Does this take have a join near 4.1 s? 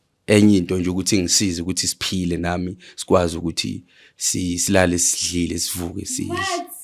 no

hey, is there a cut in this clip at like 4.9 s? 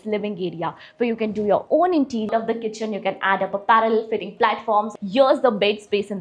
yes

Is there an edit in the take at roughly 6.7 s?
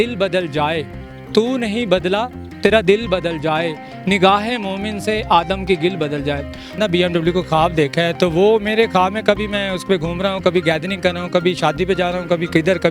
yes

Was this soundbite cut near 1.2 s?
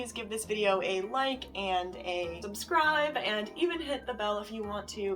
no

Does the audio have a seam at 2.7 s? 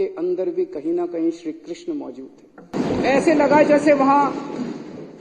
yes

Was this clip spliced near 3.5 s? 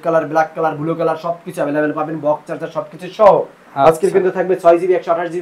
no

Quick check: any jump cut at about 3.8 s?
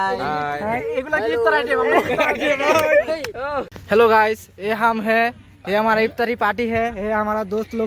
yes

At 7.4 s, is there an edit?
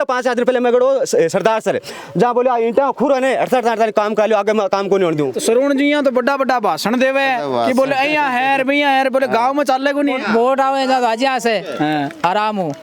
no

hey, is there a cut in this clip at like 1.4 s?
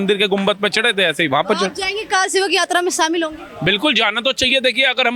no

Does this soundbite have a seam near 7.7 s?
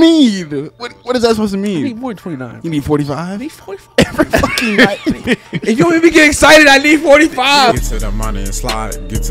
yes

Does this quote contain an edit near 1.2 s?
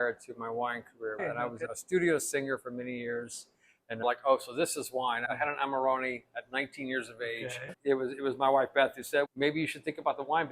yes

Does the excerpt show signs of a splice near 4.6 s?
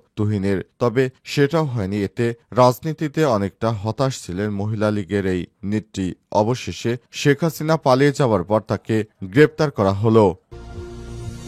no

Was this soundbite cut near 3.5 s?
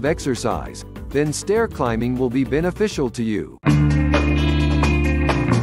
yes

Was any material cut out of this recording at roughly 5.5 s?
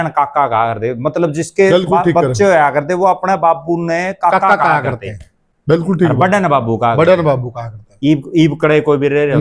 no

